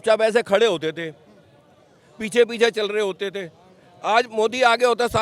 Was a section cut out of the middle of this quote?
no; 0 cuts

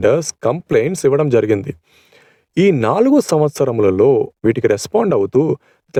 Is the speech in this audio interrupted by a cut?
no; 0 cuts

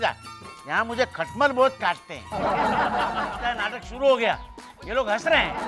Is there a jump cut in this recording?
yes; 1 cut; at 3.3 s

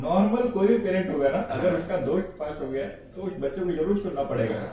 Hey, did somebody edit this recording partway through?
no; 0 cuts

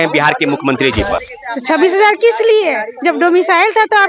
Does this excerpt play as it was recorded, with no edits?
no; 1 cut; at 1.3 s

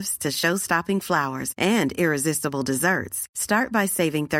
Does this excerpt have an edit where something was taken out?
no; 0 cuts

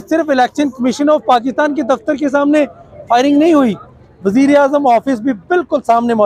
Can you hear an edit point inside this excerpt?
no; 0 cuts

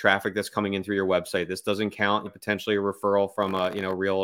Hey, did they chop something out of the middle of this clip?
yes; 1 cut; at 2.3 s

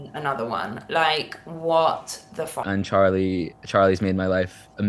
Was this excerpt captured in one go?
no; 1 cut; at 2.6 s

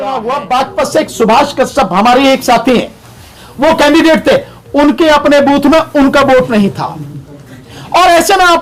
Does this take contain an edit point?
no; 0 cuts

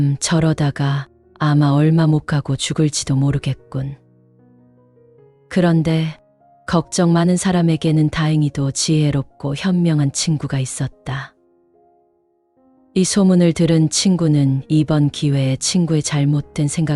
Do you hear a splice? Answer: yes; 2 cuts; at 11.4 s, 12.9 s

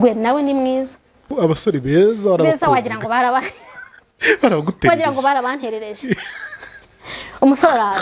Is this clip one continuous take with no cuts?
no; 1 cut; at 1.3 s

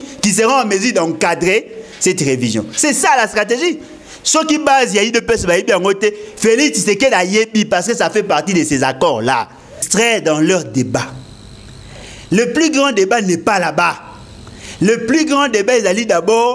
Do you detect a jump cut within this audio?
yes; 1 cut; at 9.9 s

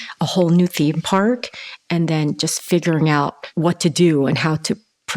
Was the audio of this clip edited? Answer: yes; 1 cut; at 3.4 s

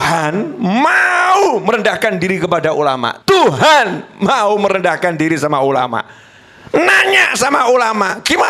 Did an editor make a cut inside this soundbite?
yes; 1 cut; at 3.1 s

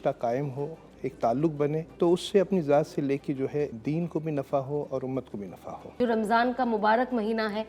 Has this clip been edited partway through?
yes; 3 cuts; at 1.9 s, 3.8 s, 5.8 s

